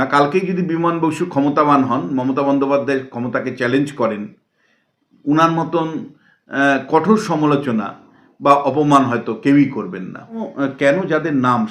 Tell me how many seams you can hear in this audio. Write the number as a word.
one